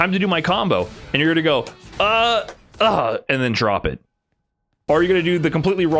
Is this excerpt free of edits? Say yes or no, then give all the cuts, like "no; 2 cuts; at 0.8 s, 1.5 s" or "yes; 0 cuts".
no; 1 cut; at 4.7 s